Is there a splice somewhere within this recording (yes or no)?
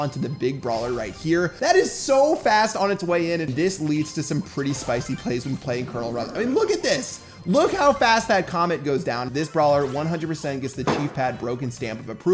yes